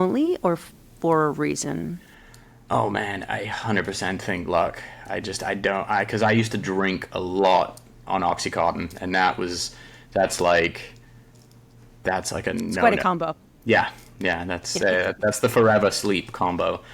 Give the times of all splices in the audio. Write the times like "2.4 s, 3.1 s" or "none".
none